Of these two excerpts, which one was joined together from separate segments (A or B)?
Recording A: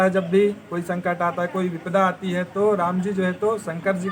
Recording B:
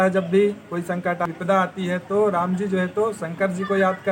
B